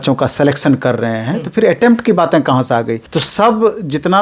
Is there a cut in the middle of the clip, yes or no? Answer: yes